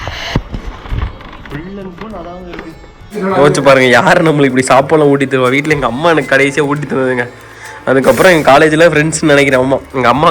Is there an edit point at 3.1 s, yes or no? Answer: yes